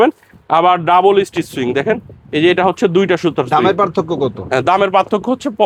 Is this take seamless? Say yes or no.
yes